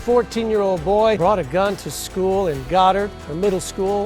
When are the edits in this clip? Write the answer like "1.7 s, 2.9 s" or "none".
1.2 s

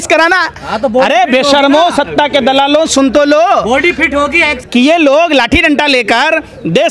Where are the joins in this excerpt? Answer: 4.6 s

